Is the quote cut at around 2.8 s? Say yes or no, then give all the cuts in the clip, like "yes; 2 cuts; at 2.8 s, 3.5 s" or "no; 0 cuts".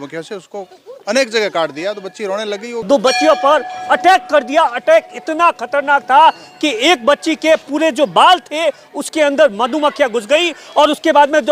yes; 1 cut; at 2.8 s